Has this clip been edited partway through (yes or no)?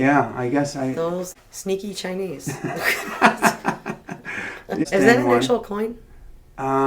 yes